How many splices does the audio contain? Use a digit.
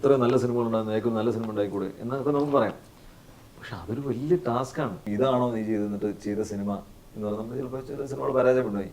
1